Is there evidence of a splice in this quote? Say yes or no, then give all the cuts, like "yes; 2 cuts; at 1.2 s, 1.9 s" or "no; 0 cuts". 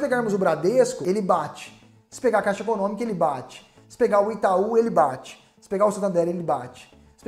yes; 1 cut; at 1.0 s